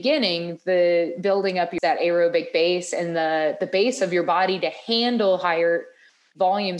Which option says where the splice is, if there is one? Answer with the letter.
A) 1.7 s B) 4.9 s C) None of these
A